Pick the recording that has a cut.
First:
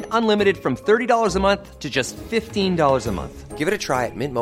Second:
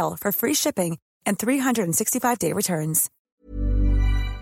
second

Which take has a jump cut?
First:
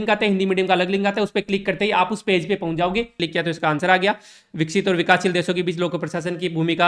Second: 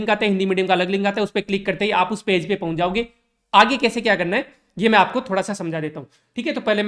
first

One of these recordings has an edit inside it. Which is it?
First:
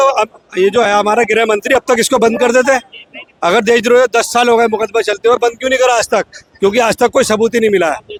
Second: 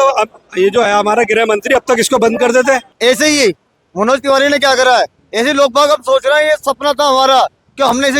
second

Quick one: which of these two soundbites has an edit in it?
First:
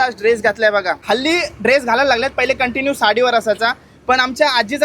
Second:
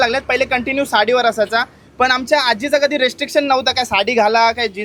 first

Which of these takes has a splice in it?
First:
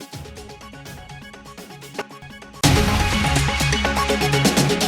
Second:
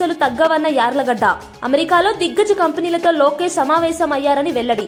first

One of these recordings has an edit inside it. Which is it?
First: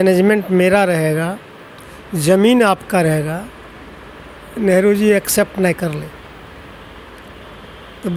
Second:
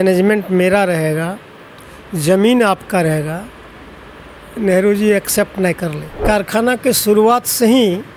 second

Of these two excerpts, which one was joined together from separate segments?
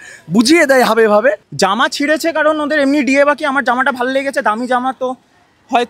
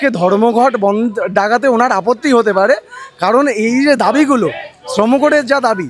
first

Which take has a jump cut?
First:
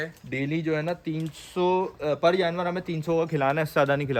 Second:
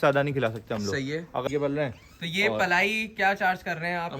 second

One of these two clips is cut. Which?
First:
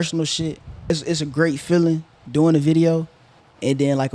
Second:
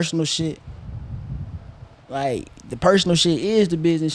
first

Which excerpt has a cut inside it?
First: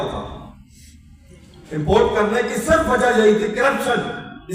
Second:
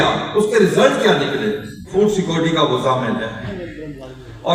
second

